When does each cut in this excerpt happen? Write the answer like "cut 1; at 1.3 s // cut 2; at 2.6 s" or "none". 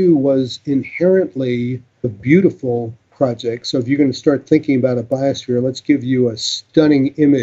cut 1; at 2.2 s // cut 2; at 6.5 s